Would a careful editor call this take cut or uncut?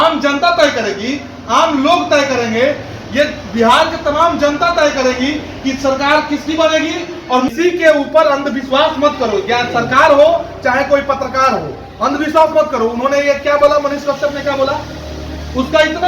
cut